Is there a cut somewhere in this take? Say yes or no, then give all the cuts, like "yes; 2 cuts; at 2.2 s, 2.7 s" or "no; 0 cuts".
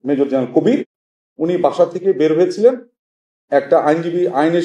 yes; 1 cut; at 0.9 s